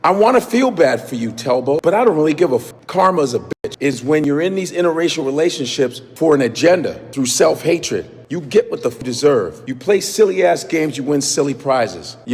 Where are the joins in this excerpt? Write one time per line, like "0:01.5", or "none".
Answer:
0:03.5